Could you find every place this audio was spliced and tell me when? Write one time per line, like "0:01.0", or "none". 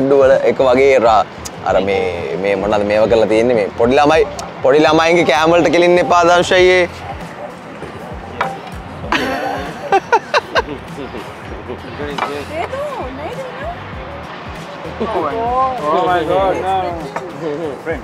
none